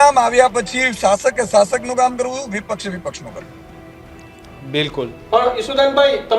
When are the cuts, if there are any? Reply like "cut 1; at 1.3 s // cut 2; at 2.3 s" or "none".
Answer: none